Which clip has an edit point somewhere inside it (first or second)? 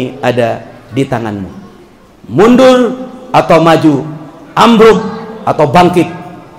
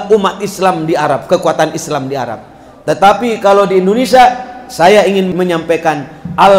second